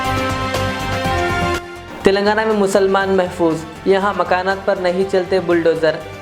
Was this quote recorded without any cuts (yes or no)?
no